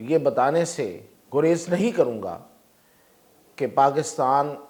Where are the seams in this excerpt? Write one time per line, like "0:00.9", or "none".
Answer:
none